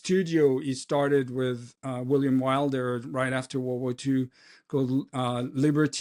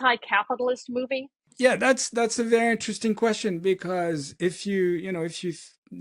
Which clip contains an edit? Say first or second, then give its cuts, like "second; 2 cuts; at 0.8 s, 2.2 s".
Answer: second; 1 cut; at 1.4 s